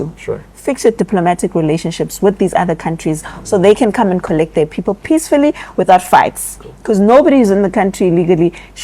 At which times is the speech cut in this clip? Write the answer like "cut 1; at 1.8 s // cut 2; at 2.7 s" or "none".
none